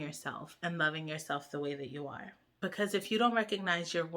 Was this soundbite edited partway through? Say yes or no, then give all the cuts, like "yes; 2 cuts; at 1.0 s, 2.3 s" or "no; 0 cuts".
yes; 1 cut; at 2.4 s